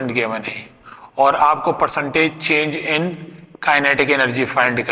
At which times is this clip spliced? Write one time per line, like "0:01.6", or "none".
none